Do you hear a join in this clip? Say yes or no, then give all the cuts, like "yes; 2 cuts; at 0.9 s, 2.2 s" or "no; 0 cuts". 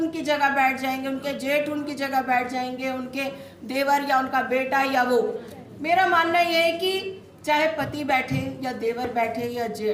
no; 0 cuts